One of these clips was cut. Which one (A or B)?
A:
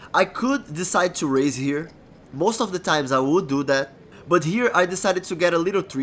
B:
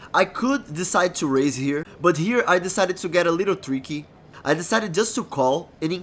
B